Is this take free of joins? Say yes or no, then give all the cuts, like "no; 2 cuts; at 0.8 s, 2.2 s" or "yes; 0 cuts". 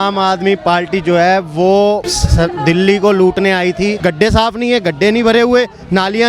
no; 2 cuts; at 2.2 s, 4.0 s